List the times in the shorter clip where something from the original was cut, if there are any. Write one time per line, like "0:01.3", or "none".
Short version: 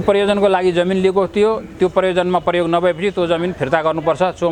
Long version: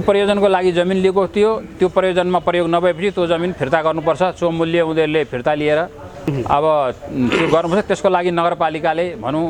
none